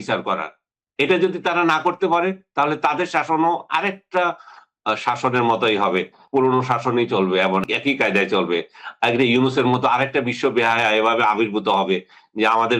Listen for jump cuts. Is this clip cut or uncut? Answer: cut